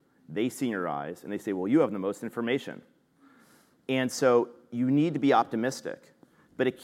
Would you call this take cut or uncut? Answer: uncut